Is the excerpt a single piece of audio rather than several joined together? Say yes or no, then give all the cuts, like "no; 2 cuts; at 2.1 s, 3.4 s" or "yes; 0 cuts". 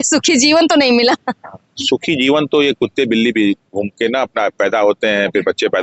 yes; 0 cuts